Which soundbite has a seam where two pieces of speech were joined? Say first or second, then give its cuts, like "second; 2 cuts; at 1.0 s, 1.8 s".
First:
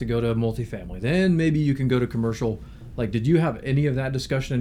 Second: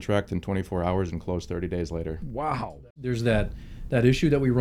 second; 1 cut; at 2.8 s